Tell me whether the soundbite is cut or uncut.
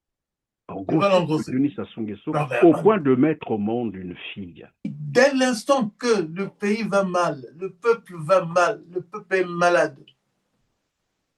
cut